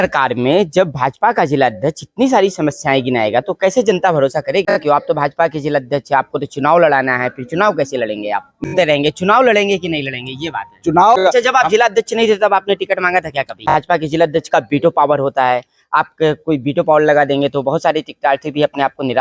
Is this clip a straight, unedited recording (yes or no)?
no